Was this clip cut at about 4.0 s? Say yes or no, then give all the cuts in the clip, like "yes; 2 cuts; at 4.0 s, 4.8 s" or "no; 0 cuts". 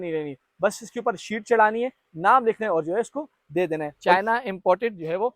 yes; 1 cut; at 4.0 s